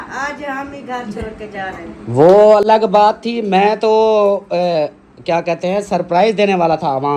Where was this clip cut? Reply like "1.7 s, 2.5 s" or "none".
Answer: none